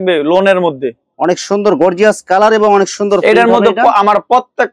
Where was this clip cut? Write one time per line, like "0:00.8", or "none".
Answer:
0:01.1